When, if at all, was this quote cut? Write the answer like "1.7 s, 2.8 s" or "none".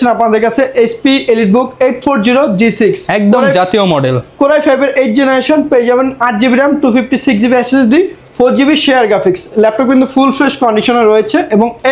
none